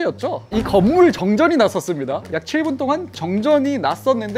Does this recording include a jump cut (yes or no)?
yes